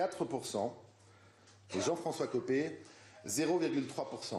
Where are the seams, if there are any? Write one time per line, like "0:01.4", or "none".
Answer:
none